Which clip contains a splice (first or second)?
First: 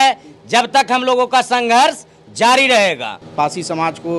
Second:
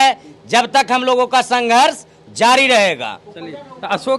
first